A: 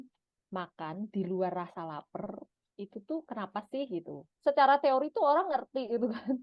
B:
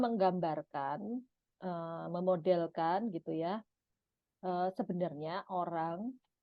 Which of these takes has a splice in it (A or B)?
A